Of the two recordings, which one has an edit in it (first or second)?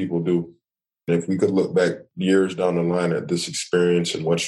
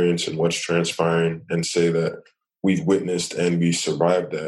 first